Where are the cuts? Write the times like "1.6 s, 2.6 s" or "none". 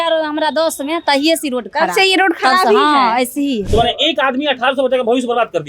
3.6 s